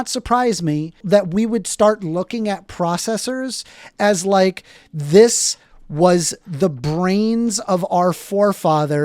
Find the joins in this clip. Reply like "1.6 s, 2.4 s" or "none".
1.0 s